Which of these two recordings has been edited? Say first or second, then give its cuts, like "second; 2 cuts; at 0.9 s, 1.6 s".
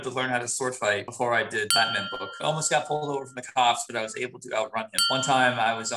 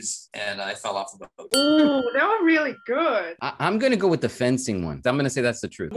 first; 2 cuts; at 2.3 s, 5.0 s